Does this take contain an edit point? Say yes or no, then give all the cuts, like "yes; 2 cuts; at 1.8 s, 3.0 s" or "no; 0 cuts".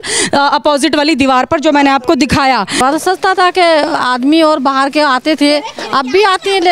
yes; 1 cut; at 2.8 s